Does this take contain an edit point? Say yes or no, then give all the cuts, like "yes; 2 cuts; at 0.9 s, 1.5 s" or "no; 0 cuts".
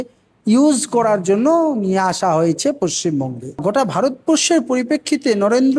yes; 1 cut; at 3.6 s